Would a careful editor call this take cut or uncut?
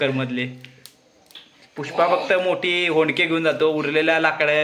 uncut